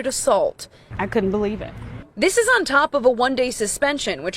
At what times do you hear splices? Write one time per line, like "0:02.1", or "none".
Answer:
0:01.0